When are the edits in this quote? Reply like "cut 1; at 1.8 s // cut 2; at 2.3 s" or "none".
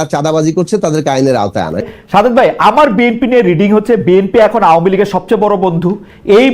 cut 1; at 1.9 s

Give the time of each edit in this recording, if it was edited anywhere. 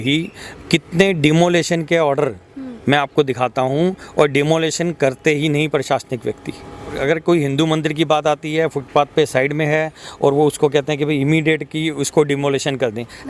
cut 1; at 7.0 s

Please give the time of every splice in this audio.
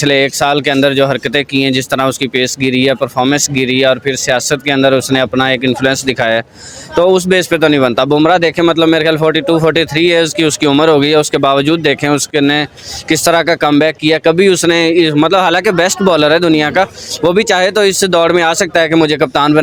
none

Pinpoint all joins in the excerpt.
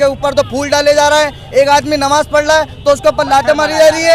none

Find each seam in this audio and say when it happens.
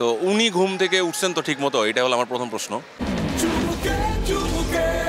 none

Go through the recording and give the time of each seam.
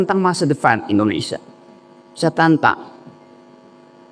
none

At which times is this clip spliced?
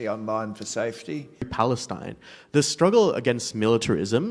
cut 1; at 1.5 s

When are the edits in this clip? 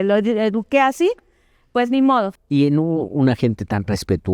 cut 1; at 2.4 s

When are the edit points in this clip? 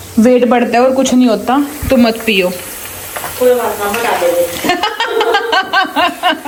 none

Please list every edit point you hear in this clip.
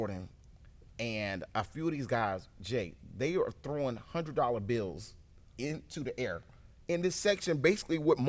none

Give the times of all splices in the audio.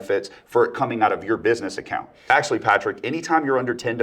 cut 1; at 2.3 s

